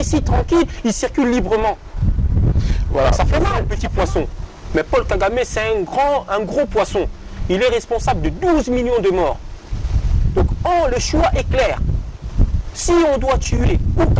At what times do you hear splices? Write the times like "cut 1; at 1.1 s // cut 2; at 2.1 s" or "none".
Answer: cut 1; at 3.8 s